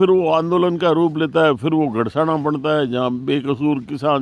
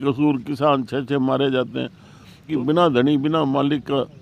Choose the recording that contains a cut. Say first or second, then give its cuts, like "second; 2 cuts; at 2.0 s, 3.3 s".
second; 1 cut; at 2.5 s